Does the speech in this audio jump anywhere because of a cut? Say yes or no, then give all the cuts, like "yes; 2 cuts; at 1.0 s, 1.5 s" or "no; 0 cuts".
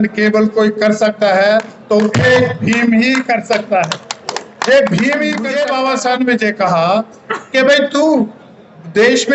yes; 1 cut; at 5.5 s